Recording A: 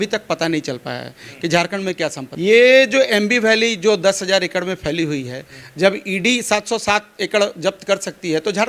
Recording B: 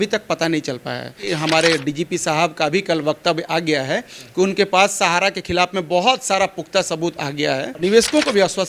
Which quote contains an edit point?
B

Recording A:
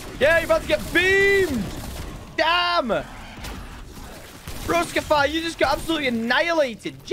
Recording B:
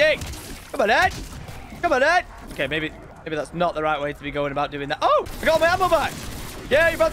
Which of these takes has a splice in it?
B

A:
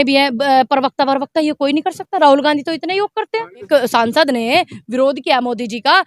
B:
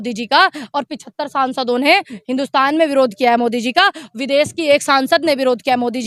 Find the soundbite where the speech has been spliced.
A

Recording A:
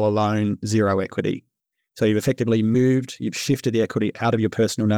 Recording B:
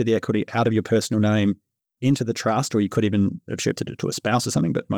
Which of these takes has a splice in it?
A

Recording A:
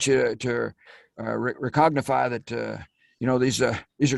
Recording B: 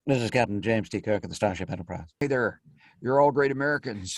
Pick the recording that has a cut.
B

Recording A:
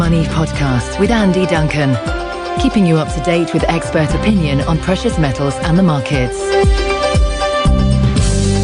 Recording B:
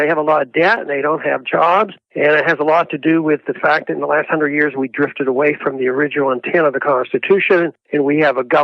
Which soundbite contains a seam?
B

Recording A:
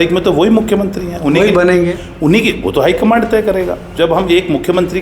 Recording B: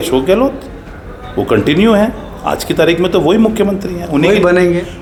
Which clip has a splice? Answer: A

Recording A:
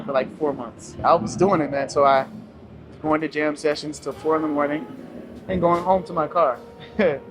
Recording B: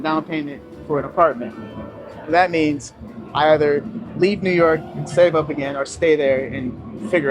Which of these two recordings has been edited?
A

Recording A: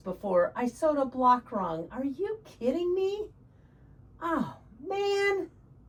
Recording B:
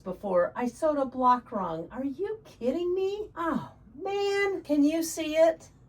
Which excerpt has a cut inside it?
B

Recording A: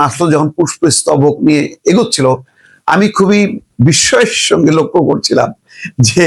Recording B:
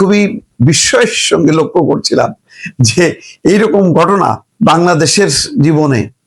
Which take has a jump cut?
B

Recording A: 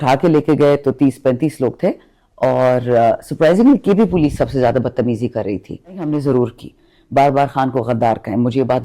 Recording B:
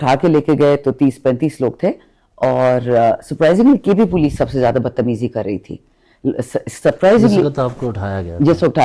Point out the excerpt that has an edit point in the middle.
A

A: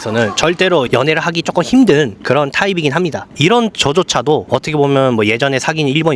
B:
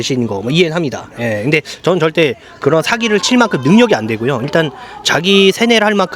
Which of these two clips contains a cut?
A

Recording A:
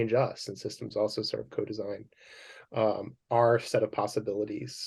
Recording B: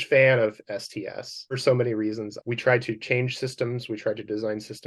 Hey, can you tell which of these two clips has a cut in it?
B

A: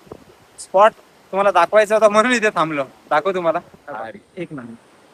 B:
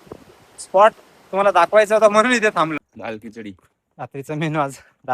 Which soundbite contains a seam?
B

